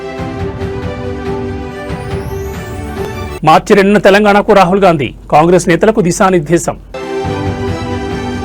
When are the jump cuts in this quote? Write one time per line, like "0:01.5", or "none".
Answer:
0:03.0
0:07.1